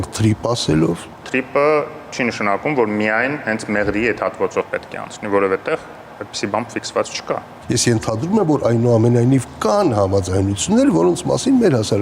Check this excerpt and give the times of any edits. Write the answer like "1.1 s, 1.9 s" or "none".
1.2 s, 7.5 s

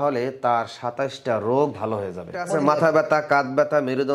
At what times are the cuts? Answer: 2.5 s

